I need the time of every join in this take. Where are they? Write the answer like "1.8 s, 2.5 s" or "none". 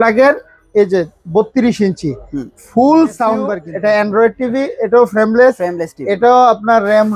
3.6 s